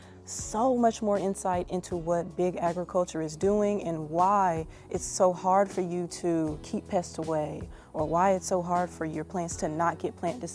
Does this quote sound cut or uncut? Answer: uncut